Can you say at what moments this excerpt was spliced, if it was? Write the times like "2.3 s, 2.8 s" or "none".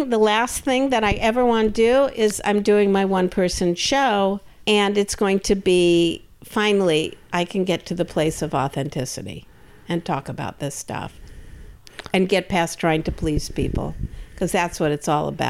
2.3 s, 4.5 s